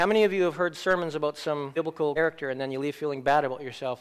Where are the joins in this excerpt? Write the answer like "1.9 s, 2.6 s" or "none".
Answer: 2.2 s